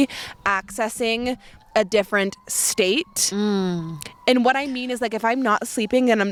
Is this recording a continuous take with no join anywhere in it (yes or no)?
yes